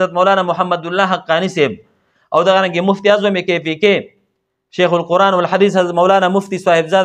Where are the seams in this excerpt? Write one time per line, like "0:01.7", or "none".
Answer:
none